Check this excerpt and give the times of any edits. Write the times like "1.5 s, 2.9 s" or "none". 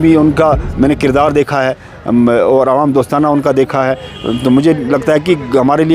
none

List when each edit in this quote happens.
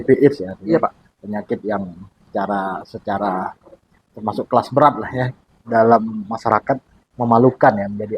2.2 s, 5.4 s

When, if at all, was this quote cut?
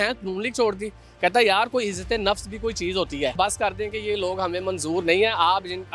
3.3 s

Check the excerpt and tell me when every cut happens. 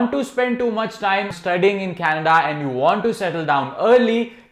1.3 s

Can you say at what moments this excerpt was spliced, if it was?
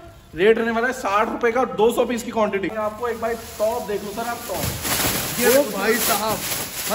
2.7 s

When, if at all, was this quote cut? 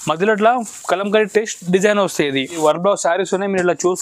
2.6 s

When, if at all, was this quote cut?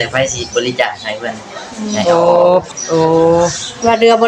2.7 s

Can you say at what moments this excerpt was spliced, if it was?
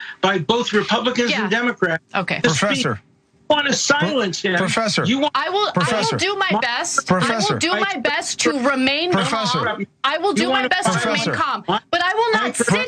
none

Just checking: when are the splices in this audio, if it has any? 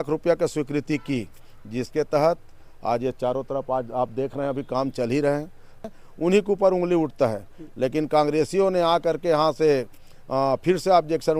5.9 s

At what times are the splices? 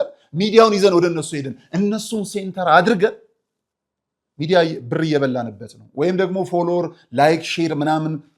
none

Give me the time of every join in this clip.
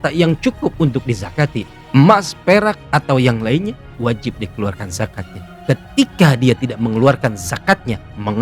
1.7 s, 3.9 s

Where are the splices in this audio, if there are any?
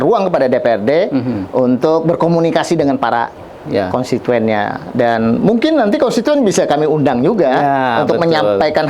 none

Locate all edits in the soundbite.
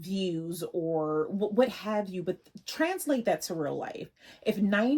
none

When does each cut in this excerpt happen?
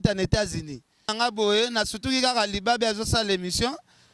1.1 s

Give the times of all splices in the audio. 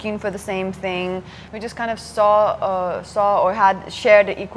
1.4 s

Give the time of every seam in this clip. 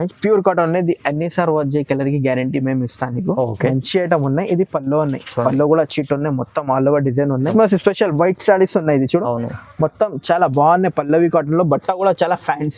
7.5 s

